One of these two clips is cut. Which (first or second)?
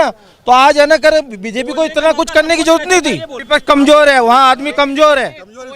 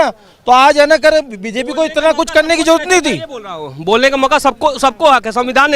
first